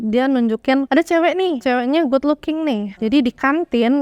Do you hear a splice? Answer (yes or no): yes